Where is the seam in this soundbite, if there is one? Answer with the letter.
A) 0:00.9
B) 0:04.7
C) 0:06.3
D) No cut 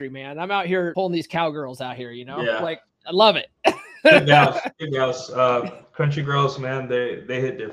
A